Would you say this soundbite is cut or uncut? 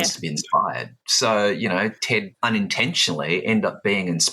cut